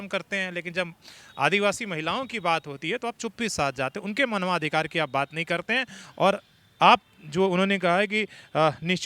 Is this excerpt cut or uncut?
uncut